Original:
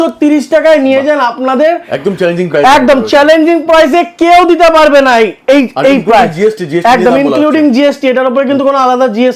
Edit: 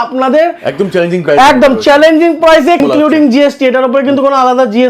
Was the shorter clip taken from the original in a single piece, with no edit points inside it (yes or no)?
no